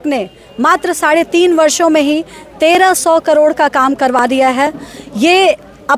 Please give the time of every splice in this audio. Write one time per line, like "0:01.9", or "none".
none